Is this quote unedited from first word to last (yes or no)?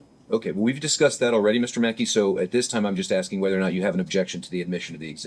yes